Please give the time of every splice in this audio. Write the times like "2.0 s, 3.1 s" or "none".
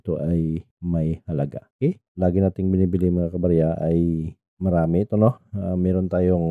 2.1 s